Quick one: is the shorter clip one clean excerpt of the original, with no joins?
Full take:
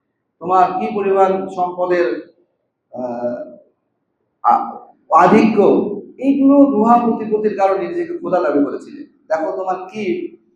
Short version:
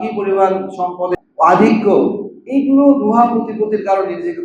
no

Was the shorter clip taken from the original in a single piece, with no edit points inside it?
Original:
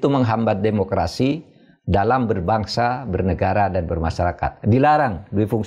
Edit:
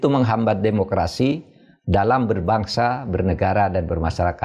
yes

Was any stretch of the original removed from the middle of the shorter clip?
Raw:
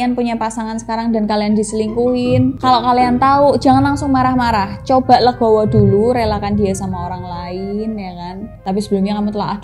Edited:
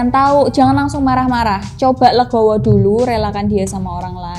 no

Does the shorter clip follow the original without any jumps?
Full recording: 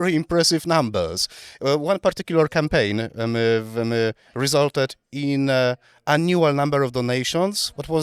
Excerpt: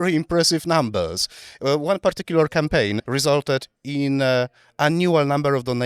no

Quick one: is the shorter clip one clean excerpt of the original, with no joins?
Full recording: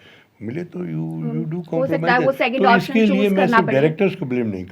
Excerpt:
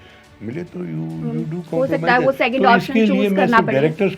yes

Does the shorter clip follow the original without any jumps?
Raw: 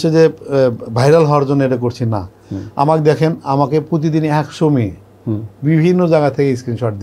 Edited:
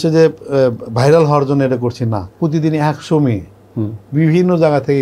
no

